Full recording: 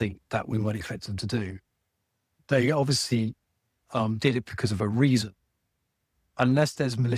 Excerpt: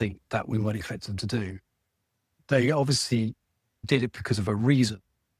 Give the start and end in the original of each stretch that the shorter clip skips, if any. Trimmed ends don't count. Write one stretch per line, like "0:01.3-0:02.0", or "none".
0:03.8-0:04.1